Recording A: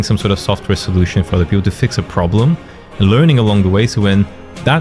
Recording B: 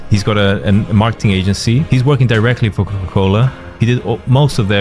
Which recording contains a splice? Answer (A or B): B